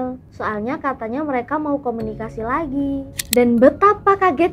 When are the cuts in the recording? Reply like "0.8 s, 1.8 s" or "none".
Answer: 3.1 s